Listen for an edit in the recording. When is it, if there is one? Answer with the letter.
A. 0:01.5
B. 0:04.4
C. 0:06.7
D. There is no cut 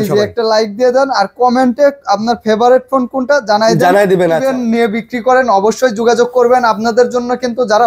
B